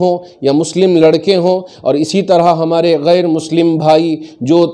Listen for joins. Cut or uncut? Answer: uncut